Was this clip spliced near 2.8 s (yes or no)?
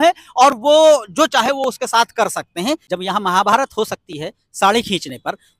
yes